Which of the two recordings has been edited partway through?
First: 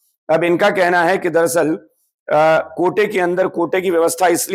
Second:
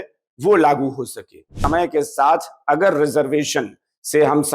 second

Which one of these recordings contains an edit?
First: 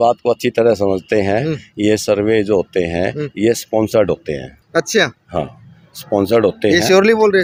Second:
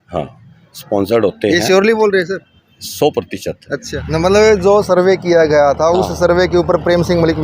second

